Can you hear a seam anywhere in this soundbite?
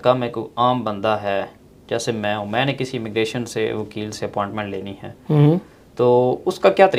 no; 0 cuts

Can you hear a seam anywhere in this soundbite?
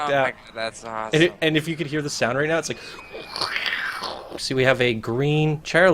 yes; 1 cut; at 4.4 s

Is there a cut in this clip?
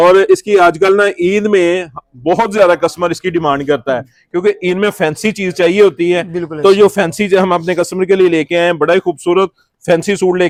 no; 0 cuts

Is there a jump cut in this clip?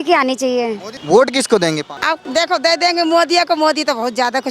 yes; 2 cuts; at 0.9 s, 2.1 s

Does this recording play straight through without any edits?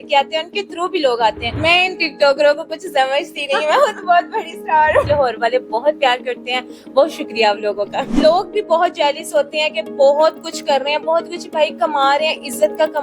no; 3 cuts; at 1.5 s, 5.0 s, 8.1 s

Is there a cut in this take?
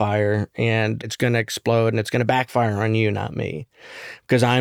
yes; 1 cut; at 1.0 s

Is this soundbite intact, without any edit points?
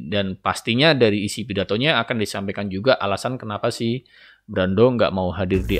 yes; 0 cuts

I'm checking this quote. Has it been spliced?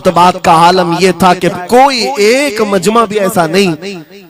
yes; 1 cut; at 1.5 s

